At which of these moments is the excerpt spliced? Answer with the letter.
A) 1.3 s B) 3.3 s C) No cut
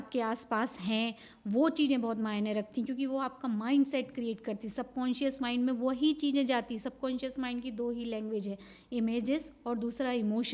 C